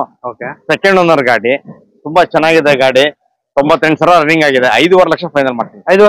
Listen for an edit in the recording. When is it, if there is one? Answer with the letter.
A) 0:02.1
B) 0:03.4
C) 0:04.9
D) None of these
D